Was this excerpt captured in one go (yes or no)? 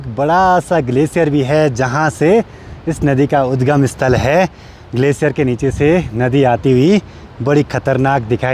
yes